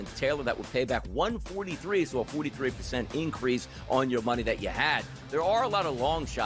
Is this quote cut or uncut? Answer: uncut